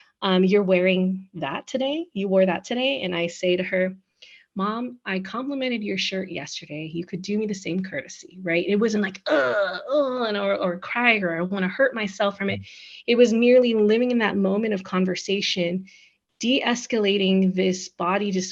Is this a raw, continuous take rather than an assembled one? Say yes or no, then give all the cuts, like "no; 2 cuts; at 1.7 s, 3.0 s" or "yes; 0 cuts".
yes; 0 cuts